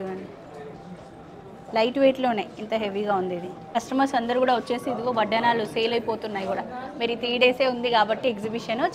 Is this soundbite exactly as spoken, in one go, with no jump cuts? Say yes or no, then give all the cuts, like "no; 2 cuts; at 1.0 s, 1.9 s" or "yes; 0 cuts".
no; 1 cut; at 3.6 s